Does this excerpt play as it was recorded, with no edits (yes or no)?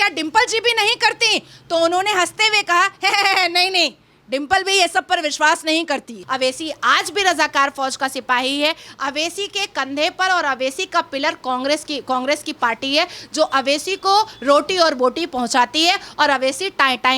no